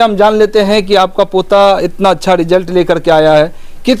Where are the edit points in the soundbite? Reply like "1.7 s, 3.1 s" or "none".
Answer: none